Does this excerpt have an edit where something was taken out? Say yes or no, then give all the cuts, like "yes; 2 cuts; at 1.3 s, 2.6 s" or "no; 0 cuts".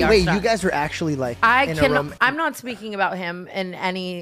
yes; 1 cut; at 1.3 s